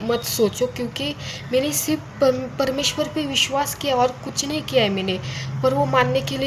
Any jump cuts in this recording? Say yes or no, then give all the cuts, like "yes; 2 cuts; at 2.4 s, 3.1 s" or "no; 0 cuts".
no; 0 cuts